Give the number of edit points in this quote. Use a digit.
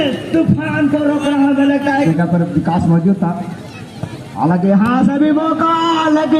1